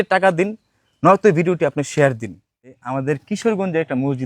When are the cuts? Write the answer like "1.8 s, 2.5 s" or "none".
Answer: 2.7 s